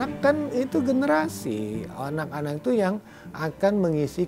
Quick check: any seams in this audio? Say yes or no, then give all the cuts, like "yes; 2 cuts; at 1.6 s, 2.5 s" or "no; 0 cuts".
no; 0 cuts